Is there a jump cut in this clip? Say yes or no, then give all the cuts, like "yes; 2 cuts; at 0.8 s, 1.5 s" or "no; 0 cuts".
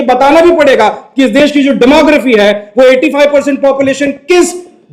no; 0 cuts